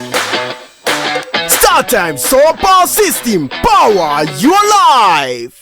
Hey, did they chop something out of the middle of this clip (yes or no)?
yes